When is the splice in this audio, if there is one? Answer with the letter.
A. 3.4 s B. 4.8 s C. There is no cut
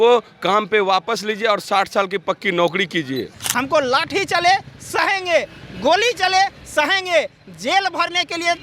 A